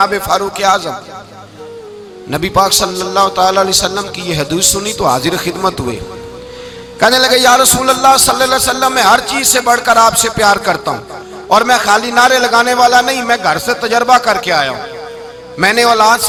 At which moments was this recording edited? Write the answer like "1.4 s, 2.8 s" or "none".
none